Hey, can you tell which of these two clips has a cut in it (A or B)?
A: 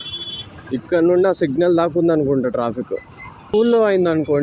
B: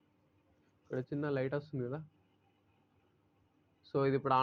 A